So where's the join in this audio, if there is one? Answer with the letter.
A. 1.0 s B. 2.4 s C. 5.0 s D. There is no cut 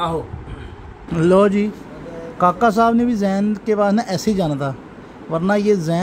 A